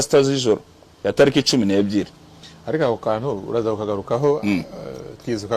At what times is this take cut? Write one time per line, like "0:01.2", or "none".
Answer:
none